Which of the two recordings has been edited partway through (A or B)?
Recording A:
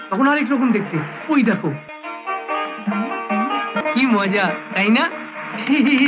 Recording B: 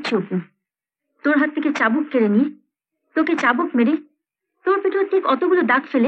A